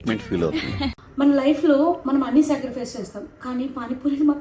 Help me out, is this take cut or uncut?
cut